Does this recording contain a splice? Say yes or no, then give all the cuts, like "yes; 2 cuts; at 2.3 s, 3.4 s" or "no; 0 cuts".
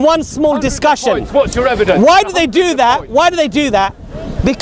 no; 0 cuts